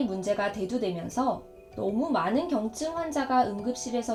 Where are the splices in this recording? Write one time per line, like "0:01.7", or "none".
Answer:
none